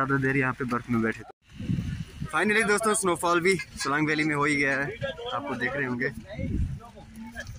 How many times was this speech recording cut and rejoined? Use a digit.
1